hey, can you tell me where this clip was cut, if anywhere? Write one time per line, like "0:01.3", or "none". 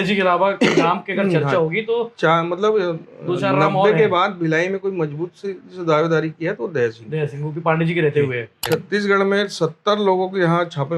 0:08.6